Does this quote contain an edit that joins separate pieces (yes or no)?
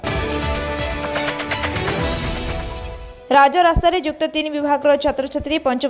no